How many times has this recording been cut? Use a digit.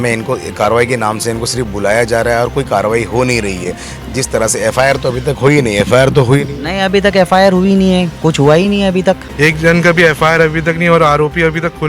1